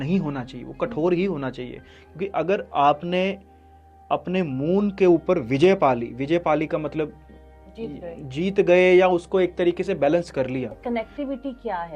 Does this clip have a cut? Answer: yes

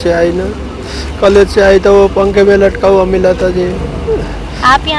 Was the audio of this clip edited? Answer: no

